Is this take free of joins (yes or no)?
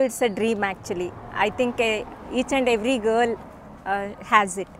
yes